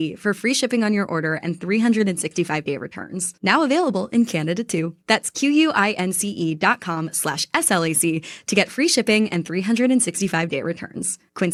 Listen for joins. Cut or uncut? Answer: uncut